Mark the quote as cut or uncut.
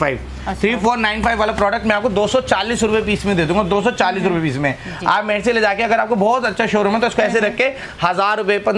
uncut